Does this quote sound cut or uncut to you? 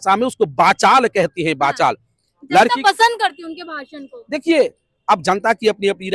uncut